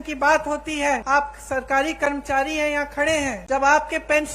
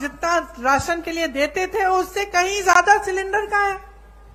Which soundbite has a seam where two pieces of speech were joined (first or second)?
first